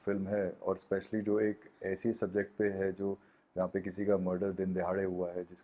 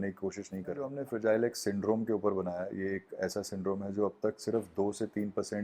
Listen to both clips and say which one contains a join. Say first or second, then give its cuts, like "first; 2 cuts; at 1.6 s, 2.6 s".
second; 1 cut; at 1.0 s